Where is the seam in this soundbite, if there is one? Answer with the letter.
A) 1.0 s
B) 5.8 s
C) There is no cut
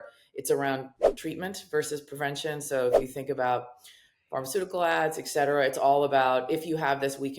A